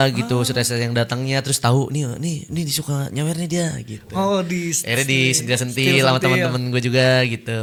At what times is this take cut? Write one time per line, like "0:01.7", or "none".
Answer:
none